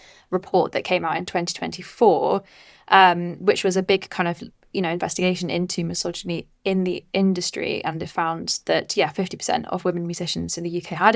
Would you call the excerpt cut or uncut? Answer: uncut